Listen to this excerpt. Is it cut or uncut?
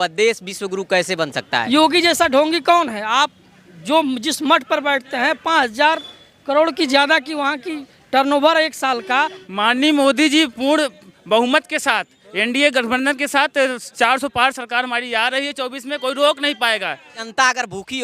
cut